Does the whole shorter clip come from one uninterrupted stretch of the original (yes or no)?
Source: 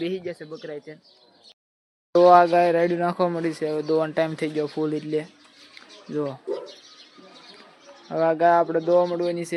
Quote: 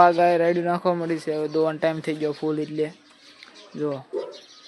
yes